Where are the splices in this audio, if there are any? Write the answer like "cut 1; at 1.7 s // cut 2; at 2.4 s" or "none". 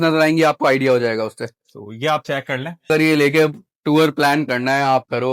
cut 1; at 2.9 s